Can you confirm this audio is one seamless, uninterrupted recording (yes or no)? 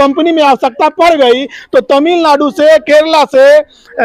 yes